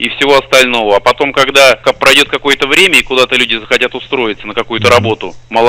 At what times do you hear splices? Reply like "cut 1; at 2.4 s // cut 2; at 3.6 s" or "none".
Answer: cut 1; at 1.8 s